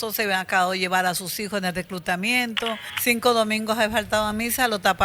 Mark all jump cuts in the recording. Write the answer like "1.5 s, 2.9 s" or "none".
2.9 s